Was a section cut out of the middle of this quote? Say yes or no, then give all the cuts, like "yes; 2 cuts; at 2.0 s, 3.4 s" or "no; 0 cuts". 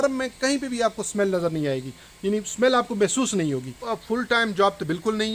yes; 1 cut; at 3.9 s